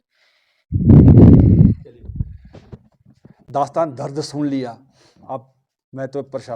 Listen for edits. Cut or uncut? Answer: cut